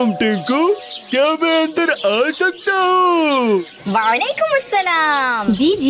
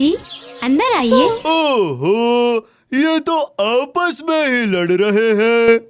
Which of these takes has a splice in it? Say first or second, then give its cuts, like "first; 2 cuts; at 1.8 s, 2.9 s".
second; 1 cut; at 1.1 s